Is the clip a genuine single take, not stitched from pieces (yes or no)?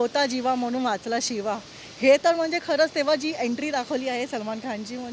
yes